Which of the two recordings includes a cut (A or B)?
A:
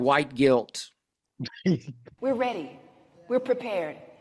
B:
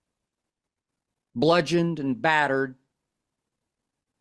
A